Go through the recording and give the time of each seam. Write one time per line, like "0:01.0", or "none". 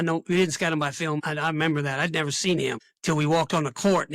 0:01.3
0:02.9